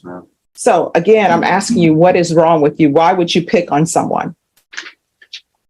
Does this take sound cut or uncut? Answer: uncut